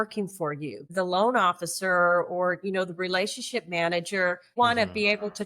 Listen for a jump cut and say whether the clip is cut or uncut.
cut